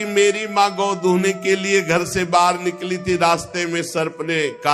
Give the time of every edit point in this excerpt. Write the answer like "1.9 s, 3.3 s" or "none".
none